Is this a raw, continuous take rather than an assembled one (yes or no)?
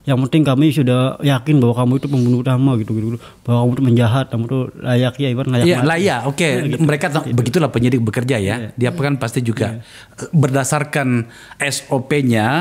yes